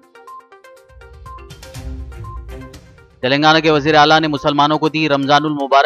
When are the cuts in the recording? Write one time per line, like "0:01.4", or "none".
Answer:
0:02.6